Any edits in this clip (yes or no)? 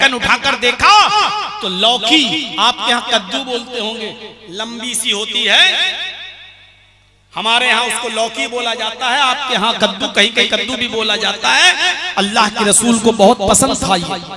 no